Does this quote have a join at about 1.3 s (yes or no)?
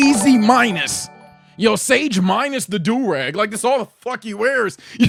no